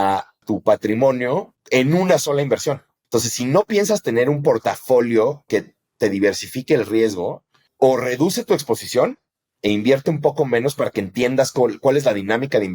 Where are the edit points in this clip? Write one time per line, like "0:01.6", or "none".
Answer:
0:01.5
0:02.9